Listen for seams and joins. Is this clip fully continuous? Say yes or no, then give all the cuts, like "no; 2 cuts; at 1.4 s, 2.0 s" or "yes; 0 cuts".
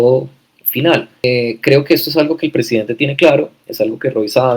no; 1 cut; at 1.2 s